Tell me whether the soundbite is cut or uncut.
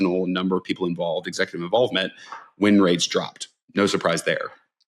uncut